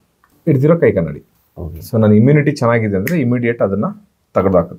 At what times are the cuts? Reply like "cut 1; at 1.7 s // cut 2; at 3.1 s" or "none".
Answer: none